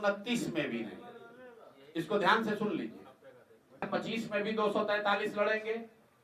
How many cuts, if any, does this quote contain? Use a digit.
1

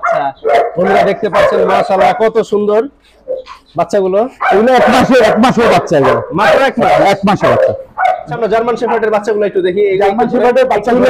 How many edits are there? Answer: 1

